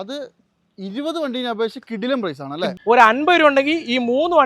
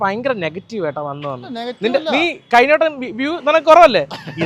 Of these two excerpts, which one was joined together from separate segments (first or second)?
first